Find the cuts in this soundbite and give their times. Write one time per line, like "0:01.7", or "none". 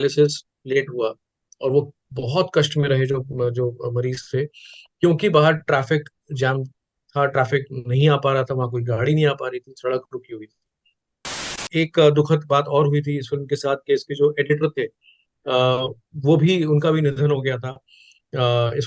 0:11.5